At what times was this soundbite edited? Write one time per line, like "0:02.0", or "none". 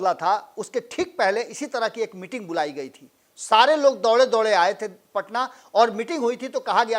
none